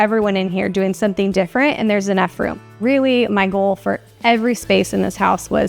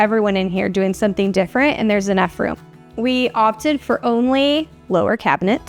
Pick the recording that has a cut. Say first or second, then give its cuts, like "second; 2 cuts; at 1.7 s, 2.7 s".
first; 1 cut; at 2.7 s